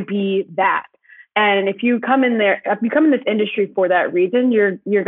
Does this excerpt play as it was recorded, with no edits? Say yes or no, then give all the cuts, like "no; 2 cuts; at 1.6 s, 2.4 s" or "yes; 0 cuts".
yes; 0 cuts